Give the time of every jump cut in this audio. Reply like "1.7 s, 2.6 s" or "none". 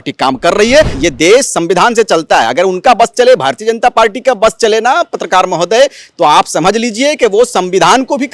0.9 s